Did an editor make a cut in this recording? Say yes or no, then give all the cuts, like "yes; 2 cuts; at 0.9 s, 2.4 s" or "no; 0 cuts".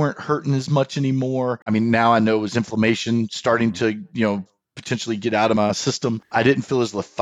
yes; 2 cuts; at 1.6 s, 5.8 s